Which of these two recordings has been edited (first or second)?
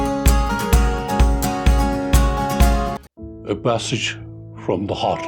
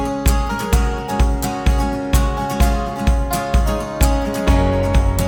first